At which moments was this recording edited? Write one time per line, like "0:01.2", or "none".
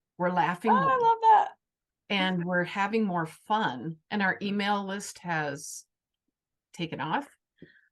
0:04.0